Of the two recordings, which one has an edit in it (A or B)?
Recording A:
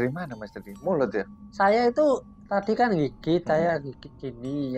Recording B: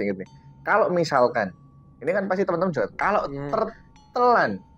A